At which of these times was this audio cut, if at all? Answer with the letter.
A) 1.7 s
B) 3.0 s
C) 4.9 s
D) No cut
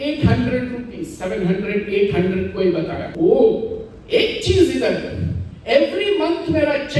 B